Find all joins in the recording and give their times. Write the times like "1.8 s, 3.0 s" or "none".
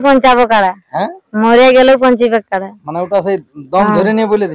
none